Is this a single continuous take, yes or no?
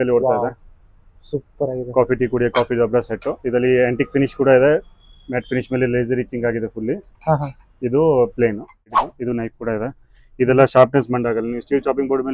no